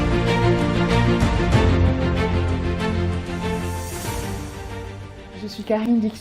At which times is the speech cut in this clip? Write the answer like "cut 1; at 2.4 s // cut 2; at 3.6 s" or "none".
none